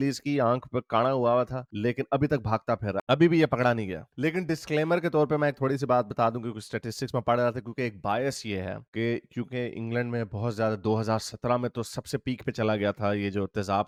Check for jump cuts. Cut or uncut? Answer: uncut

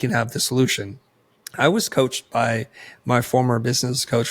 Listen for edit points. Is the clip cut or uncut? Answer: cut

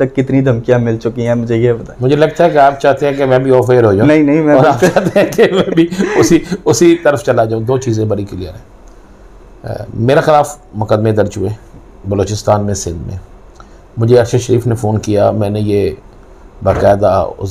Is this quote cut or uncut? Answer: uncut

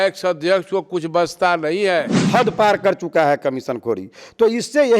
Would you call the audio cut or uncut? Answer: cut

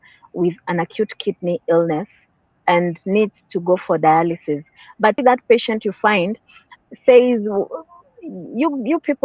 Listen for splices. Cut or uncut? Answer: cut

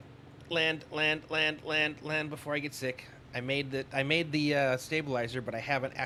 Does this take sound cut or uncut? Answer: uncut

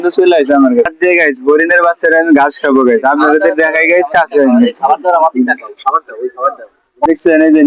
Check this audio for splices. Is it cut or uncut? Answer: cut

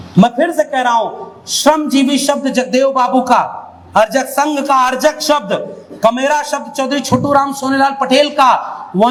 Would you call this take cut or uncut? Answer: uncut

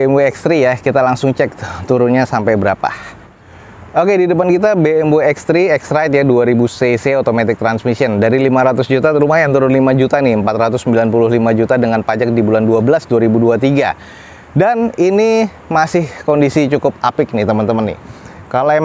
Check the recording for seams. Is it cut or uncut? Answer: uncut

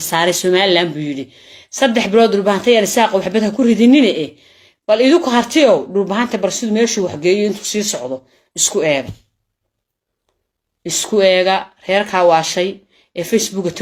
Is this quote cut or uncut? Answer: uncut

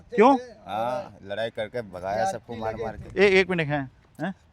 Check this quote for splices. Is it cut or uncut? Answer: uncut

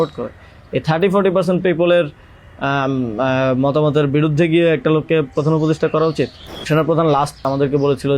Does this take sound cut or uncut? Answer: cut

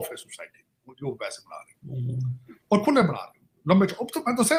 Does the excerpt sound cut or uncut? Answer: uncut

